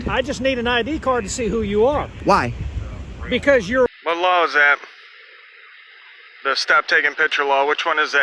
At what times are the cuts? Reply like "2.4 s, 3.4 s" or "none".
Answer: 3.9 s